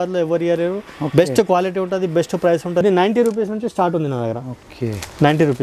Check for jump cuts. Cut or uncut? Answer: cut